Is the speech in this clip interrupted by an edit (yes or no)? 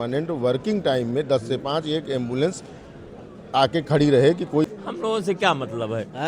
yes